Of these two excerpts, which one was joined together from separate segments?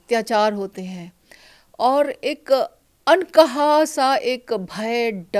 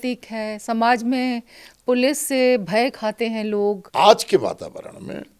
second; 1 cut; at 3.8 s

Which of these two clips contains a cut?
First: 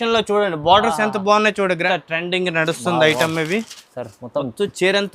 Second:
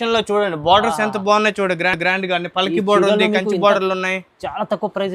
first; 1 cut; at 1.8 s

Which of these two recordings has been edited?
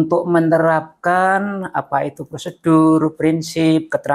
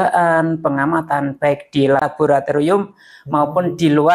second; 1 cut; at 2.1 s

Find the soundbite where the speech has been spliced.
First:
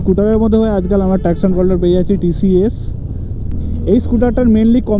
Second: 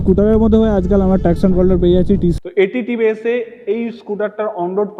second; 1 cut; at 2.4 s

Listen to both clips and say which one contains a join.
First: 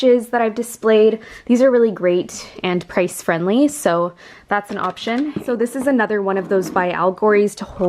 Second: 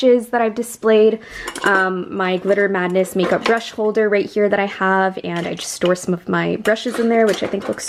first; 2 cuts; at 1.3 s, 5.4 s

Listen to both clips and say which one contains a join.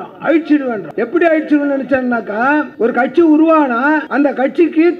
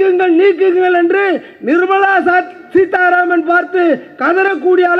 first; 3 cuts; at 0.9 s, 2.7 s, 4.1 s

